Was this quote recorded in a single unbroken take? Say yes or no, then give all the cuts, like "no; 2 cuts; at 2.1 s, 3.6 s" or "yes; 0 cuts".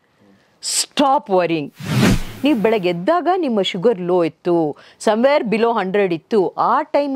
no; 1 cut; at 2.2 s